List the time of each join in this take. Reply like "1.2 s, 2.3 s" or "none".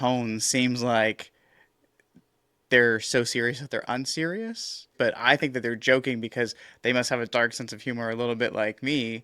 4.9 s